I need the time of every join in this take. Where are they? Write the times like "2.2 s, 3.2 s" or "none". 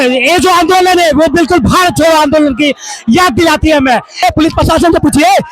4.2 s